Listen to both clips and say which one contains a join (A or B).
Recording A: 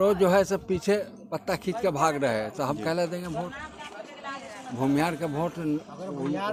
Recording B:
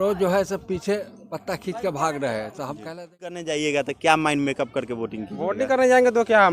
B